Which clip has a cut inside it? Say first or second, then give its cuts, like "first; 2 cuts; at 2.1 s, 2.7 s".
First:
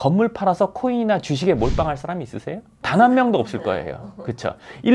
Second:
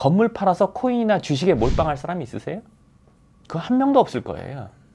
first; 1 cut; at 2.7 s